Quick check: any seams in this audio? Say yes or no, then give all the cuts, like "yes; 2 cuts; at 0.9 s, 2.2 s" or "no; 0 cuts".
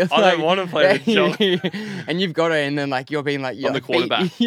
no; 0 cuts